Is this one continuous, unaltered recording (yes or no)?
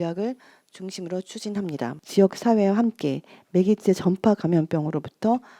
no